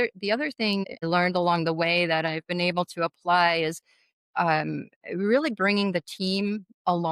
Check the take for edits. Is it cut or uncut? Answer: cut